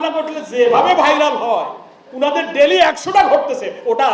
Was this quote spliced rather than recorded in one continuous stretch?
no; 0 cuts

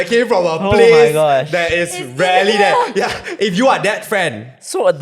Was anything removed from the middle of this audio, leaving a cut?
yes; 1 cut; at 3.3 s

